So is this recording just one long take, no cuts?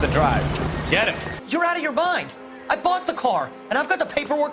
no; 1 cut; at 1.3 s

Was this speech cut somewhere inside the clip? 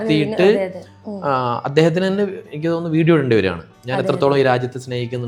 no; 0 cuts

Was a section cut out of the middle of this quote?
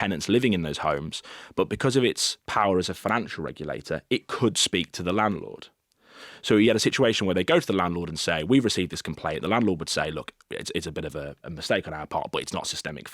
yes; 1 cut; at 11.4 s

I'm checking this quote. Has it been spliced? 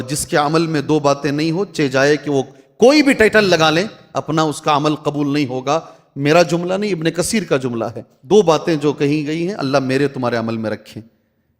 yes; 1 cut; at 8.1 s

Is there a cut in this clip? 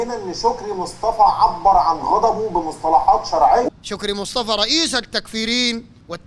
yes; 1 cut; at 3.9 s

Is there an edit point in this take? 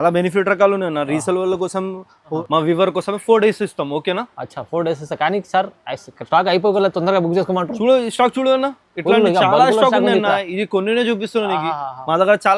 yes; 1 cut; at 2.4 s

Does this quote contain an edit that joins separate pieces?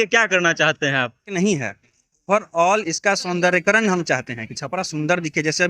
yes; 1 cut; at 1.3 s

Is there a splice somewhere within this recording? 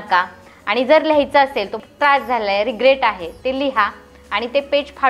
yes; 1 cut; at 1.8 s

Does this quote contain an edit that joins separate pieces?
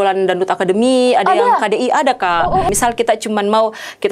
yes; 1 cut; at 2.7 s

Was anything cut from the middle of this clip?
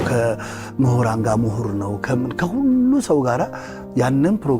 no; 0 cuts

